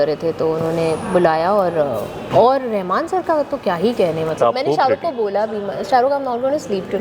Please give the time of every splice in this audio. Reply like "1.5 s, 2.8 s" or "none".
2.2 s, 4.4 s